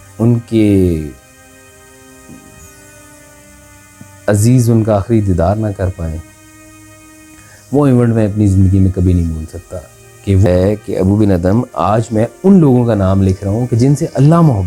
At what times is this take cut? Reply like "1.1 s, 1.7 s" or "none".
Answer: 10.5 s